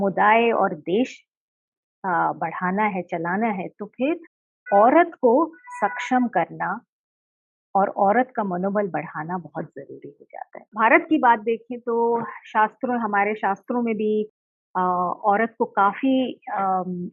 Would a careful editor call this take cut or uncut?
cut